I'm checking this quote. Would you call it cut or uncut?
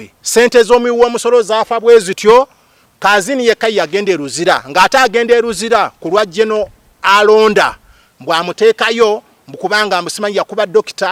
uncut